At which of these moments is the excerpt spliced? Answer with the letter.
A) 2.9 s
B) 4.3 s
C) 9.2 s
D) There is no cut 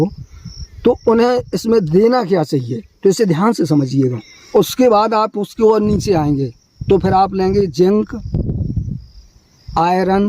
B